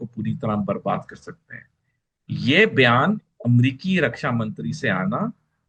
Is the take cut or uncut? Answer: uncut